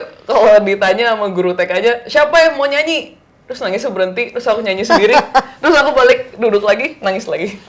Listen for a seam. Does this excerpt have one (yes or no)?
no